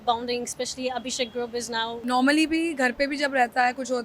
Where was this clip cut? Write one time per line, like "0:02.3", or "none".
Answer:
0:01.9